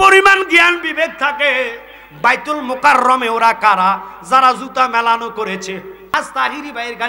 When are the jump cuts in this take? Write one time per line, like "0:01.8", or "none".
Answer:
0:06.2